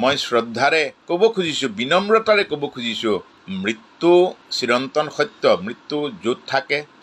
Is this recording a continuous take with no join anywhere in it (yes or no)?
no